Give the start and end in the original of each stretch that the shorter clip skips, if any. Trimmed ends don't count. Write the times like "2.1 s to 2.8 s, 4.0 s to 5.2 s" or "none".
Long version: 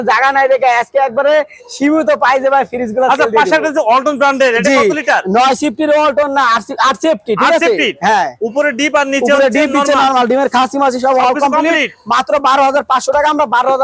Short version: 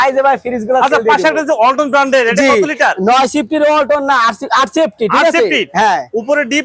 none